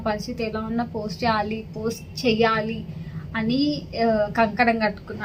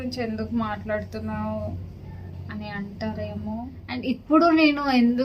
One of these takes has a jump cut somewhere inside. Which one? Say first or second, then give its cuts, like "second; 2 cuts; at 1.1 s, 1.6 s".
second; 1 cut; at 3.8 s